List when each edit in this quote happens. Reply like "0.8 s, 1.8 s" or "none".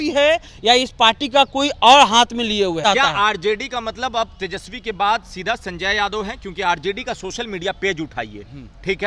2.8 s